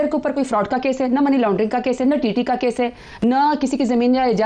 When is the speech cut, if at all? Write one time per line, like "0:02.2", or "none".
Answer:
none